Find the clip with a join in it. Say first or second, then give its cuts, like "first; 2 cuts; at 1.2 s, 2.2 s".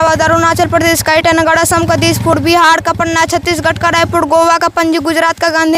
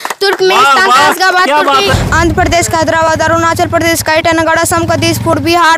second; 1 cut; at 1.9 s